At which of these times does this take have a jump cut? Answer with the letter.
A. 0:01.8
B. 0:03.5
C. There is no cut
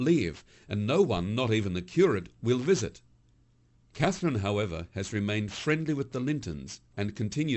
A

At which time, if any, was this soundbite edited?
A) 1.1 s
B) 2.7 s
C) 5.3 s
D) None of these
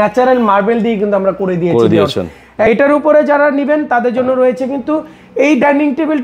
B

